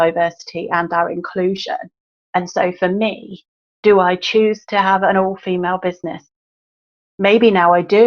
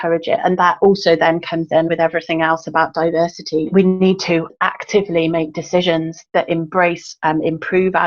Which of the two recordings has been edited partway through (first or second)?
second